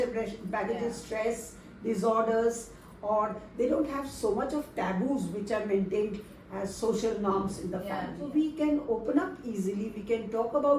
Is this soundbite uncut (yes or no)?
no